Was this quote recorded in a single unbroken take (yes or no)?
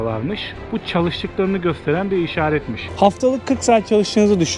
no